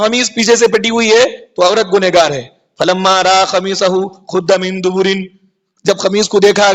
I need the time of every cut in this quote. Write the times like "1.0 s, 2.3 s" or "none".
none